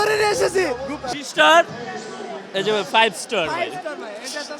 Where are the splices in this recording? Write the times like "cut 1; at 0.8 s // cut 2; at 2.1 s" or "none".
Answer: cut 1; at 1.0 s